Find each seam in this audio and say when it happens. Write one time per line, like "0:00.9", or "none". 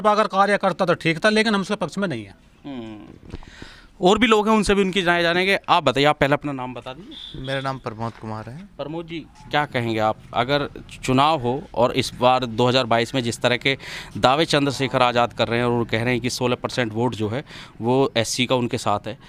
none